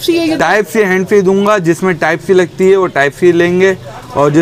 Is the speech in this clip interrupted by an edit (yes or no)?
no